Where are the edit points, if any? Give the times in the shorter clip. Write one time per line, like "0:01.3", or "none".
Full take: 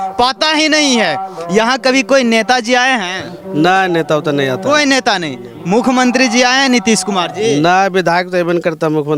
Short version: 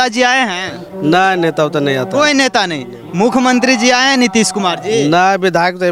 none